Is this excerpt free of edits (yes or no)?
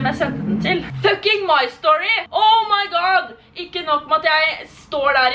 no